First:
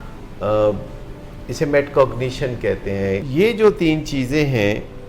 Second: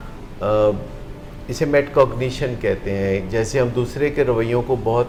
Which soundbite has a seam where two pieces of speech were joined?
first; 1 cut; at 3.2 s

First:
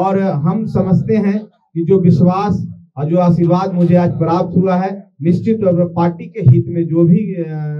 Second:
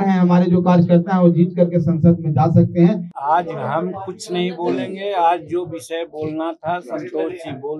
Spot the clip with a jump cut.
second; 1 cut; at 3.1 s

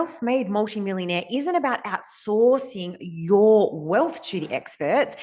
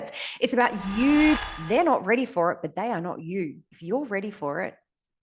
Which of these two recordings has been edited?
second; 1 cut; at 1.4 s

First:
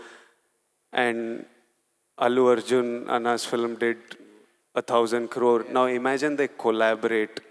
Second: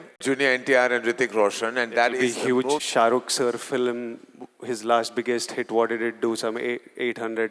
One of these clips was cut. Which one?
second; 1 cut; at 2.8 s

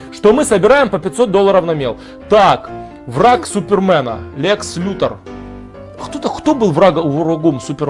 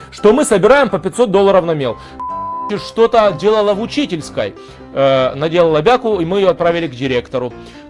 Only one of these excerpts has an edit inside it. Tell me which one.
second; 1 cut; at 2.3 s

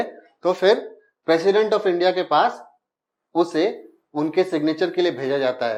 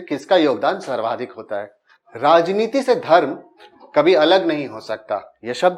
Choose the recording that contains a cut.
second; 1 cut; at 1.8 s

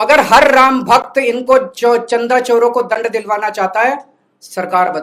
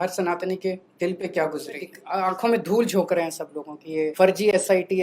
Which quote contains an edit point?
second; 3 cuts; at 0.9 s, 2.0 s, 4.1 s

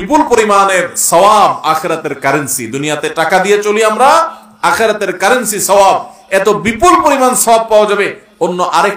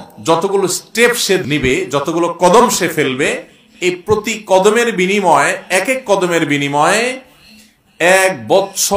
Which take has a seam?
second; 1 cut; at 1.4 s

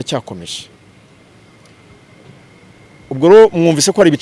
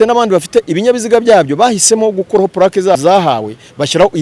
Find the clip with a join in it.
second; 1 cut; at 3.0 s

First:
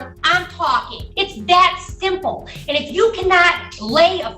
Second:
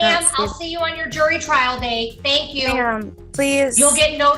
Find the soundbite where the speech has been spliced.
first; 1 cut; at 1.0 s

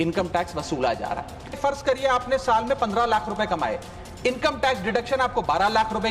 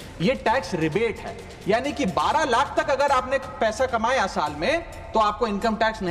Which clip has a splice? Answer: first; 1 cut; at 1.5 s

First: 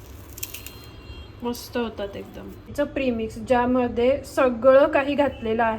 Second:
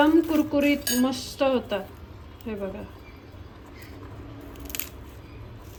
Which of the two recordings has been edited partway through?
first; 1 cut; at 2.7 s

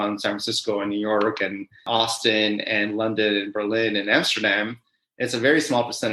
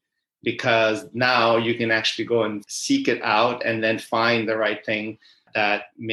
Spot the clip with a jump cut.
first; 1 cut; at 1.8 s

